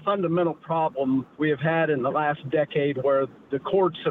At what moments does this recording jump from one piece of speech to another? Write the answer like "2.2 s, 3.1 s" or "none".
1.3 s